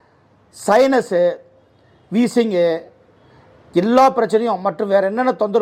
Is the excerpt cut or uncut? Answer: uncut